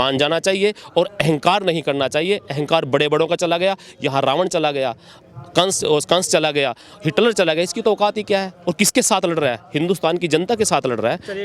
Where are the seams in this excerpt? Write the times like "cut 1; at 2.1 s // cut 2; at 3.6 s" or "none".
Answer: none